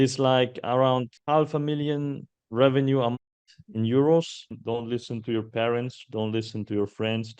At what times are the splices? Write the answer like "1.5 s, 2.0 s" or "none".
1.1 s, 4.5 s